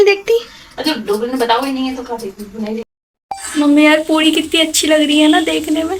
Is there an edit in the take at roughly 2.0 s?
no; 0 cuts

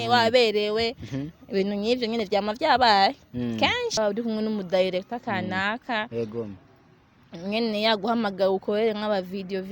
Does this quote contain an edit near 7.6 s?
no; 1 cut; at 4.0 s

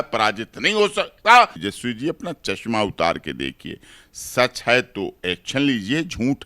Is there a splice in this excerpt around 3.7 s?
no; 1 cut; at 1.7 s

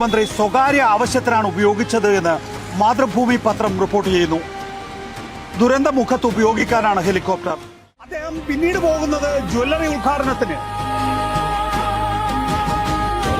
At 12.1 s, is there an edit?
no; 1 cut; at 8.2 s

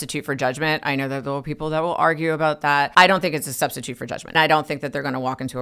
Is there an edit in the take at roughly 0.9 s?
no; 2 cuts; at 2.7 s, 4.3 s

